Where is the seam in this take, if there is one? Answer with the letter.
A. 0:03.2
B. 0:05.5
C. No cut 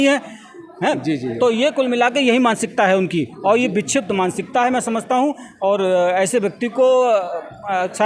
C